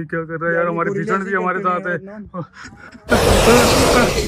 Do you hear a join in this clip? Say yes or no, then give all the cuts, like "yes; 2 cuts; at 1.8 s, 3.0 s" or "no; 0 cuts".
yes; 1 cut; at 2.6 s